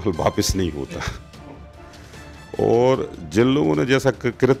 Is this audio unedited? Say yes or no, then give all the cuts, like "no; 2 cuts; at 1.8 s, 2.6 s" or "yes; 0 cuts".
no; 2 cuts; at 1.2 s, 2.5 s